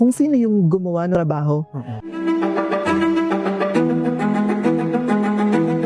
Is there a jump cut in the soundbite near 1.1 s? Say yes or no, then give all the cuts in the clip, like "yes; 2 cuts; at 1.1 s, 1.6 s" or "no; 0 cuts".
yes; 1 cut; at 1.1 s